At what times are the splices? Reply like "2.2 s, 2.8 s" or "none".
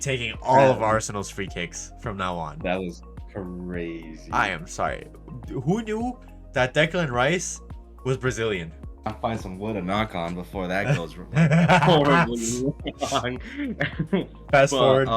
9.1 s